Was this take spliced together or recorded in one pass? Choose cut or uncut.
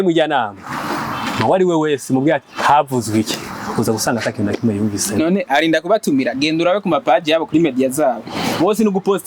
uncut